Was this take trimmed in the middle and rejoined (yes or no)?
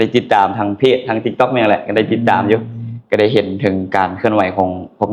no